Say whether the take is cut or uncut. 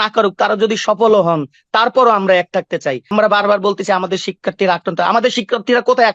cut